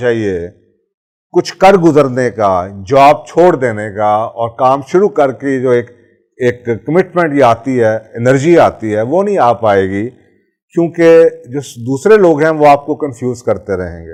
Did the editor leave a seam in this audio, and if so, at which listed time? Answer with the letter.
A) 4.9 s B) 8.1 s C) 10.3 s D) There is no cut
D